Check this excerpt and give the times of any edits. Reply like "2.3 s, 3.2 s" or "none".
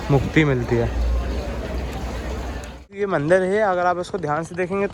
2.8 s